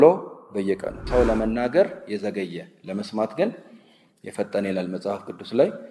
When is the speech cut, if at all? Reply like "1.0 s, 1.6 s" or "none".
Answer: 1.0 s